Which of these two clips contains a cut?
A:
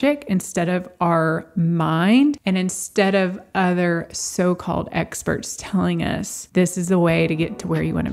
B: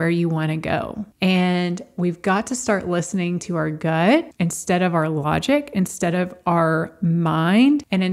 B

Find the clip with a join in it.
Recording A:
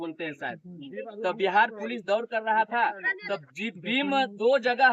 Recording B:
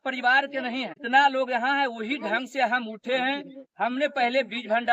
B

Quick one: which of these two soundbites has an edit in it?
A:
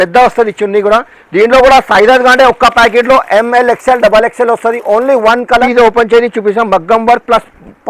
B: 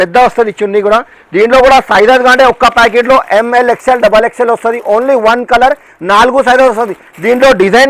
A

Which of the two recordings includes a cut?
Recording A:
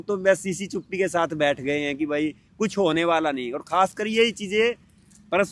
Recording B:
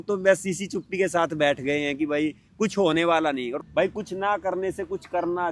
B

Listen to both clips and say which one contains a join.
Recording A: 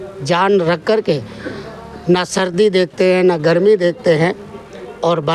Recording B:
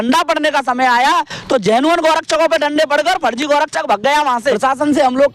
B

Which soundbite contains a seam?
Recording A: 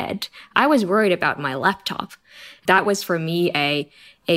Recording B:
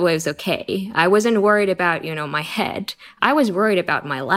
A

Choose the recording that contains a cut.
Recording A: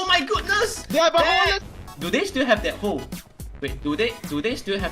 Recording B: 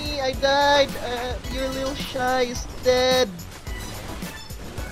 A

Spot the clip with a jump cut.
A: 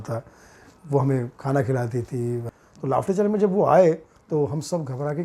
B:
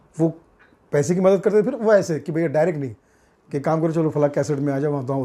A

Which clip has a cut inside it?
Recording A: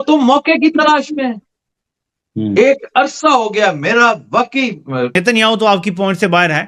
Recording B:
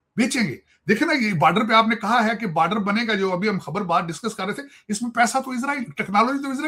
A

